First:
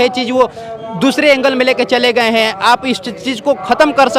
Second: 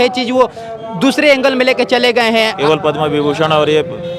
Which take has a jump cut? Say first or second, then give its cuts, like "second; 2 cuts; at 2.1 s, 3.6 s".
second; 1 cut; at 2.5 s